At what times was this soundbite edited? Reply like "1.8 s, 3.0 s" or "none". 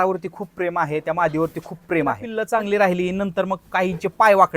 2.3 s